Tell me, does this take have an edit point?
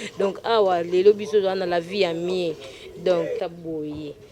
yes; 1 cut; at 3.4 s

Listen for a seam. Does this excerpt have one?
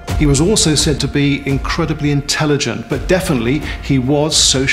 yes; 1 cut; at 1.0 s

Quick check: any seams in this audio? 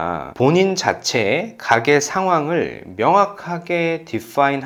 no; 0 cuts

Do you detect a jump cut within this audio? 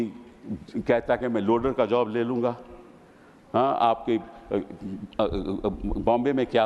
no; 0 cuts

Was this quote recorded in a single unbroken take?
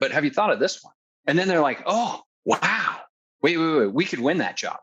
no; 3 cuts; at 1.0 s, 2.3 s, 3.2 s

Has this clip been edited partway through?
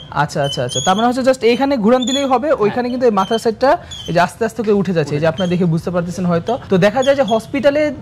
no; 0 cuts

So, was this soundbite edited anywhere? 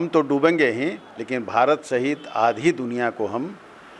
no; 0 cuts

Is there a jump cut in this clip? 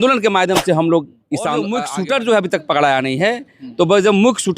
yes; 1 cut; at 1.7 s

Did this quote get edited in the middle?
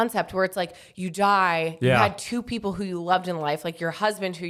no; 0 cuts

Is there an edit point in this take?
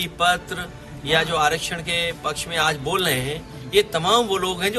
no; 0 cuts

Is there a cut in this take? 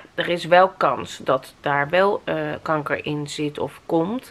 no; 0 cuts

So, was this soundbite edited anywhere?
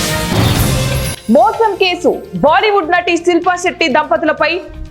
no; 0 cuts

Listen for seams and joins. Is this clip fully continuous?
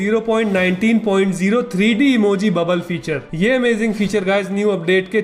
yes; 0 cuts

